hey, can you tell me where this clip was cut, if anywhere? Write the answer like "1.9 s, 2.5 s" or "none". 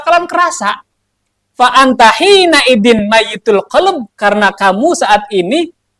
none